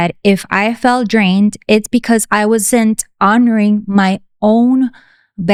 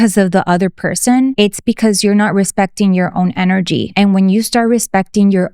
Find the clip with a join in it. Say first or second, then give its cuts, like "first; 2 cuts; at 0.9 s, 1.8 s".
second; 2 cuts; at 1.3 s, 3.9 s